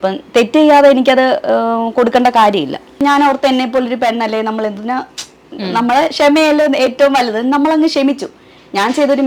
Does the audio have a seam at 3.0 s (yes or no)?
yes